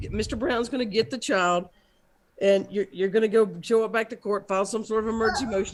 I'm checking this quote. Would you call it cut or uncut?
uncut